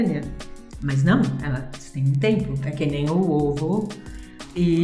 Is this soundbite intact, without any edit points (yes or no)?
yes